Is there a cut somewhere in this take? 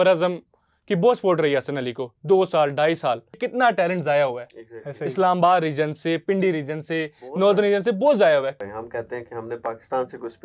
yes; 2 cuts; at 3.4 s, 8.6 s

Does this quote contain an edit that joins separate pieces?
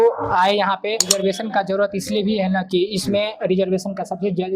yes; 1 cut; at 1.1 s

